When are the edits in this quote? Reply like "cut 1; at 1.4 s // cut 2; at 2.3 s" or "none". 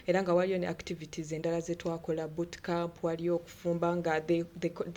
none